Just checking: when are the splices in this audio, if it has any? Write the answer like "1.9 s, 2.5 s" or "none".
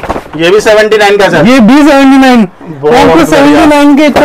none